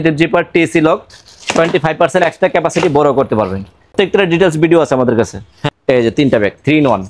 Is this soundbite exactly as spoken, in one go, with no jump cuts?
no; 2 cuts; at 3.9 s, 5.6 s

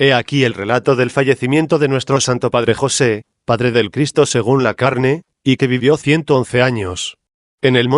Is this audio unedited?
yes; 0 cuts

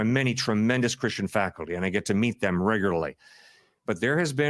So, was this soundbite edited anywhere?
yes; 1 cut; at 1.7 s

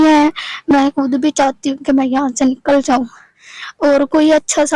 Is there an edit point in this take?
no; 0 cuts

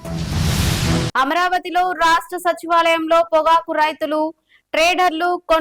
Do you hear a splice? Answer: no; 0 cuts

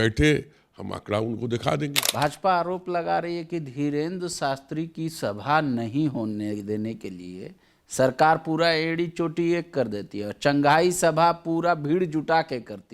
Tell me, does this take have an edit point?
yes; 1 cut; at 2.0 s

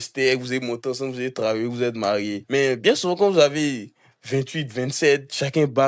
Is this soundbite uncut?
no; 1 cut; at 2.4 s

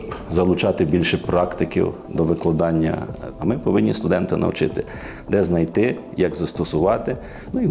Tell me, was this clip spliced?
yes; 1 cut; at 3.2 s

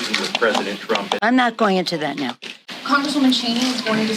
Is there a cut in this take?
yes; 1 cut; at 2.5 s

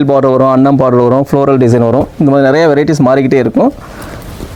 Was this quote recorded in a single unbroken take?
yes; 0 cuts

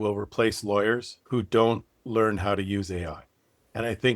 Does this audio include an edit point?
yes; 1 cut; at 1.1 s

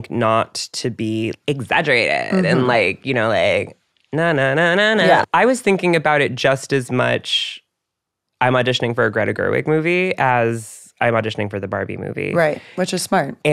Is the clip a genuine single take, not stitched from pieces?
no; 1 cut; at 5.2 s

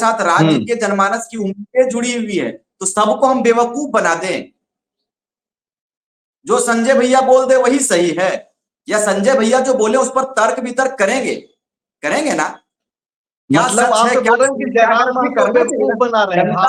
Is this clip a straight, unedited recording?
yes; 0 cuts

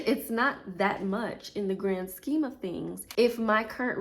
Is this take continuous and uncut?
no; 1 cut; at 3.0 s

